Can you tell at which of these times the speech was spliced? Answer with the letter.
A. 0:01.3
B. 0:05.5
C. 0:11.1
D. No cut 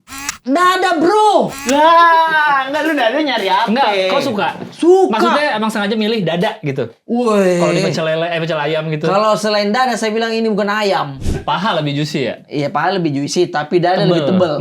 C